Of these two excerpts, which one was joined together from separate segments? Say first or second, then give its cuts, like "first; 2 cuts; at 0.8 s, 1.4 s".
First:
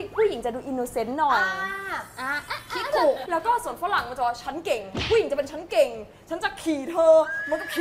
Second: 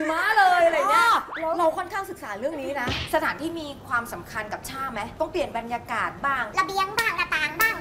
second; 3 cuts; at 3.0 s, 5.1 s, 6.5 s